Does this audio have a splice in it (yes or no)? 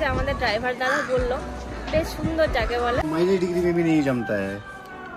yes